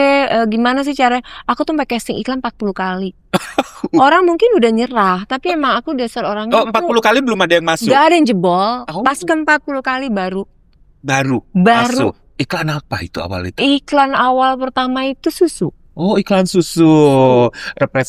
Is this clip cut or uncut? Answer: uncut